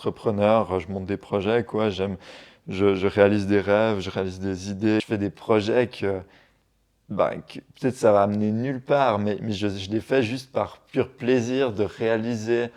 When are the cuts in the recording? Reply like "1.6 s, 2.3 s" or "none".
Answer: 5.0 s